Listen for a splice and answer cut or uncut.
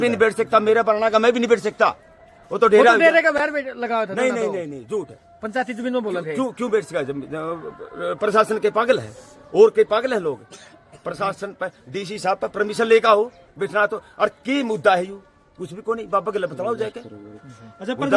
uncut